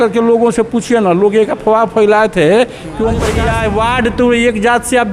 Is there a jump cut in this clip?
yes; 1 cut; at 3.5 s

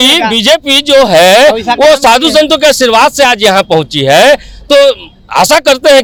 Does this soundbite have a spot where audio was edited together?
no; 0 cuts

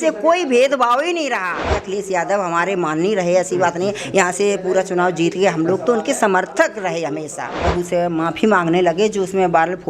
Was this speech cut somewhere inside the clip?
yes; 2 cuts; at 1.8 s, 7.6 s

